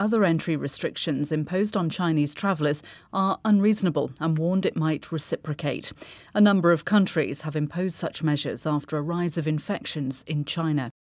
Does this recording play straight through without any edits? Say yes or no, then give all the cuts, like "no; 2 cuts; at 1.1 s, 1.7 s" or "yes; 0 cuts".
yes; 0 cuts